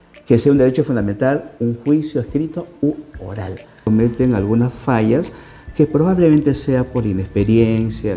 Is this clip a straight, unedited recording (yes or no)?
no